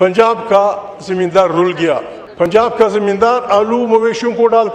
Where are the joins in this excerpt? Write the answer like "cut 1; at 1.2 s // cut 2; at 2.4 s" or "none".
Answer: cut 1; at 2.2 s